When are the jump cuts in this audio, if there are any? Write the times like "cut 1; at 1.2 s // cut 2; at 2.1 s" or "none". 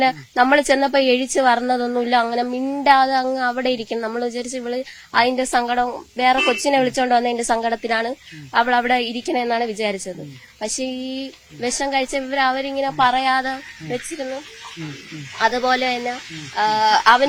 none